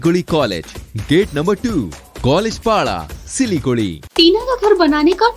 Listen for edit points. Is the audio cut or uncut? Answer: cut